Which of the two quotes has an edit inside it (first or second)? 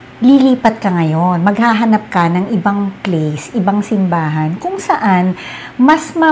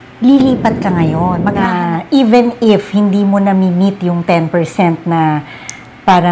second